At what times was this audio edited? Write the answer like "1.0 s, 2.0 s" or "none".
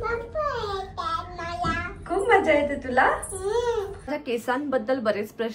4.2 s

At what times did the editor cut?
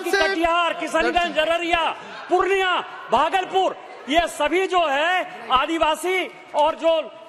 none

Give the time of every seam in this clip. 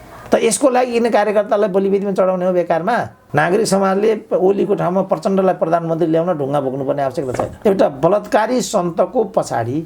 3.2 s, 7.5 s

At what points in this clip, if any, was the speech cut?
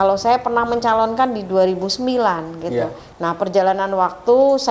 3.0 s

